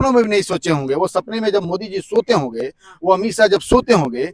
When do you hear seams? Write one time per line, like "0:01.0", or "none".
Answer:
none